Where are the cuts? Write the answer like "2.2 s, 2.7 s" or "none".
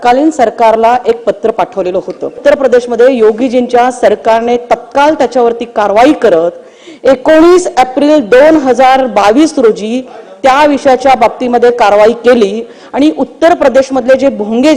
2.4 s